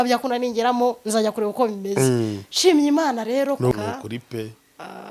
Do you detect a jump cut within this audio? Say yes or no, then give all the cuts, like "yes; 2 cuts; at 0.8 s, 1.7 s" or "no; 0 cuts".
yes; 1 cut; at 3.7 s